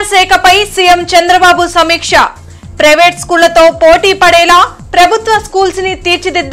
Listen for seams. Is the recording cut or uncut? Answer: uncut